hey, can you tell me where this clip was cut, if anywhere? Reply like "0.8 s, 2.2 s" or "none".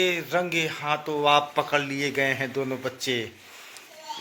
none